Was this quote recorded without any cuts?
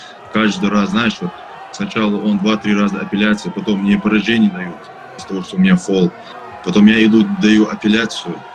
yes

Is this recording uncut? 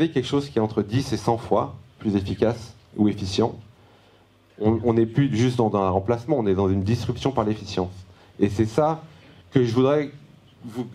yes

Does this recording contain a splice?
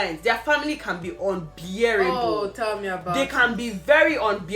no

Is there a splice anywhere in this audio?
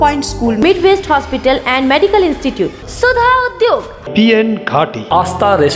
no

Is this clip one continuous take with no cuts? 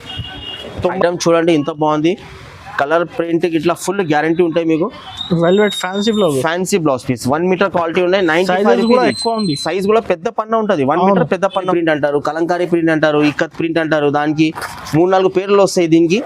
no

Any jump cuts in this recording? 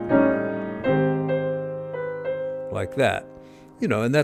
no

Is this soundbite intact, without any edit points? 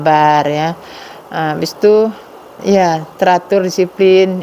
yes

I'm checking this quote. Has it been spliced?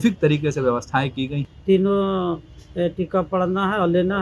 yes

